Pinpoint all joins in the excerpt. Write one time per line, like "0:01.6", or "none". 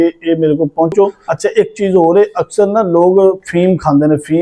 0:01.2